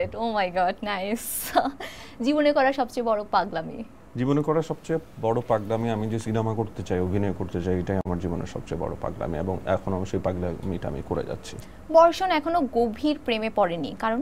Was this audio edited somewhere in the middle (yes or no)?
no